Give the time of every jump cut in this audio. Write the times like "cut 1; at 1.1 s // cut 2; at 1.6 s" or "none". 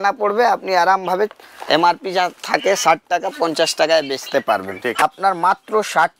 cut 1; at 5.0 s